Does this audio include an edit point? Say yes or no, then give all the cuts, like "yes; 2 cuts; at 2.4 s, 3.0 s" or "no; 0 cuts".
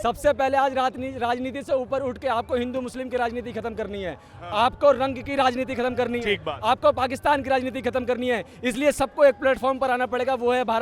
no; 0 cuts